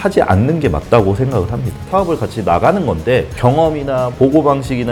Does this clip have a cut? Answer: yes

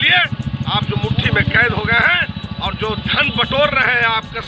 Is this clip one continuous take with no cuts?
yes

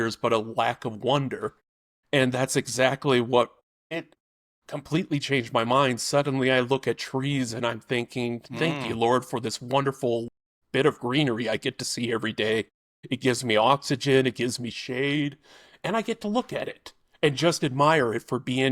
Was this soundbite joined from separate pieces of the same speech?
no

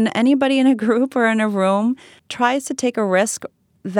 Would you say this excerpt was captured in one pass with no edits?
yes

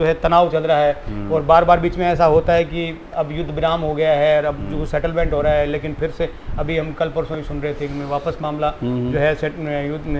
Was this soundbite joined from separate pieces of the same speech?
no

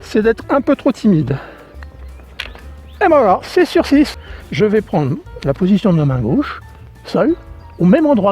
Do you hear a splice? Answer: yes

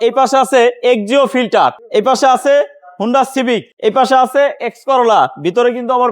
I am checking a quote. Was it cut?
yes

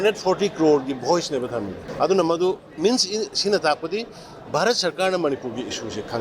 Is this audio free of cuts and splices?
no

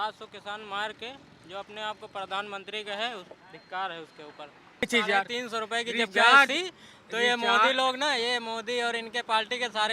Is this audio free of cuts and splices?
no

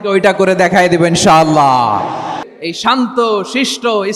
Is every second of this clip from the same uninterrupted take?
no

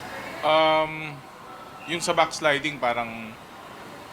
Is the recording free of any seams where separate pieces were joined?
no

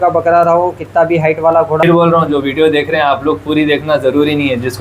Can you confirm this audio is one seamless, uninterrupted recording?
no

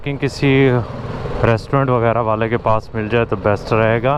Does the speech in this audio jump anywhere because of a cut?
no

